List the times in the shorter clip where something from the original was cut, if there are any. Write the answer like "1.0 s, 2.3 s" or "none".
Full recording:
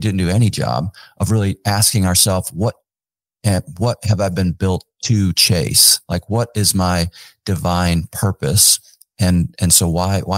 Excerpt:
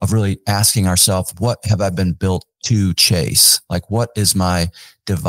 1.3 s